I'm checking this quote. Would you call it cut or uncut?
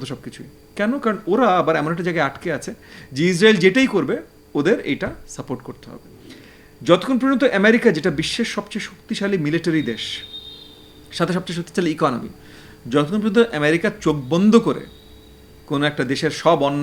uncut